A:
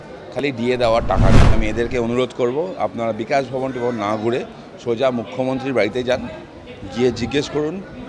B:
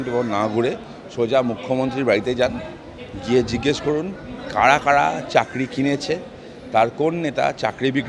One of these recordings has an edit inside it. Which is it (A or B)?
A